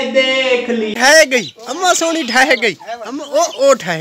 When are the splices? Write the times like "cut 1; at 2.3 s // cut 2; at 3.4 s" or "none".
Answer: cut 1; at 0.9 s